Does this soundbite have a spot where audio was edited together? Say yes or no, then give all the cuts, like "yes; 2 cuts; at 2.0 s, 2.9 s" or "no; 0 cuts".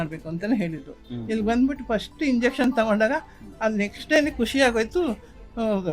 yes; 1 cut; at 1.1 s